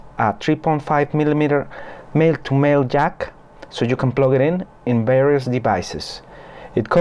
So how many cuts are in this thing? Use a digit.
0